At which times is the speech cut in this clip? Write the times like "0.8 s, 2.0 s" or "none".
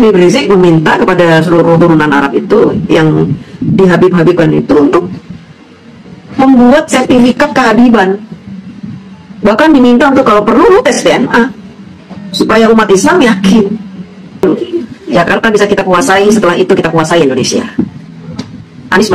14.4 s